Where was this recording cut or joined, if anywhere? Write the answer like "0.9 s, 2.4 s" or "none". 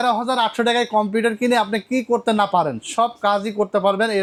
none